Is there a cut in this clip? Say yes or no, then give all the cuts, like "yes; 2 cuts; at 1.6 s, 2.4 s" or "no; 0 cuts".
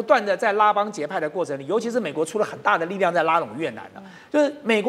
no; 0 cuts